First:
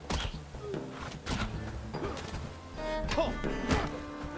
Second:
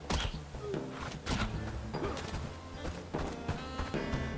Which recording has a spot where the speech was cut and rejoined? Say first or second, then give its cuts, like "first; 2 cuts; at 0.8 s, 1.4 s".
first; 1 cut; at 2.8 s